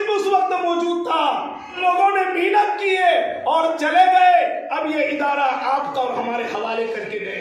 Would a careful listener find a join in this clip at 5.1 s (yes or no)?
no